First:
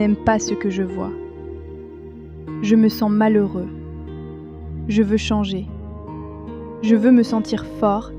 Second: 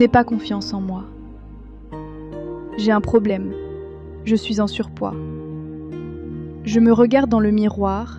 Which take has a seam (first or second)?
second